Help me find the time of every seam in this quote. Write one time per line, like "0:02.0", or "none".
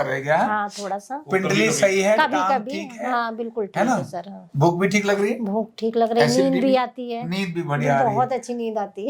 0:04.4